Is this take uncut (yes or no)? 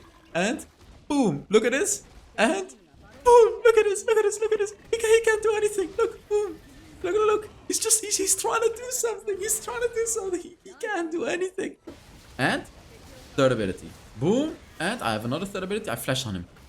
no